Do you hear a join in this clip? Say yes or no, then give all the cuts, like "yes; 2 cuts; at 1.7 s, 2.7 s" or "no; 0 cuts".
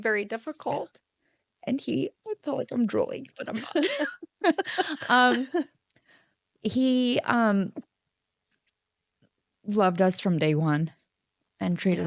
no; 0 cuts